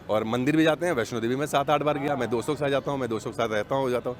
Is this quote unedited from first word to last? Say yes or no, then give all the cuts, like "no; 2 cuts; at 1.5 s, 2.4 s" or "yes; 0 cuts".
yes; 0 cuts